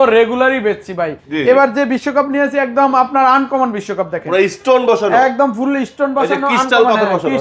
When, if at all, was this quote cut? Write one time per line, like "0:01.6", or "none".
none